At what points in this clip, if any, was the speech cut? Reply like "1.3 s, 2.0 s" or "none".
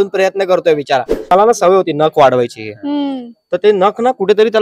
1.3 s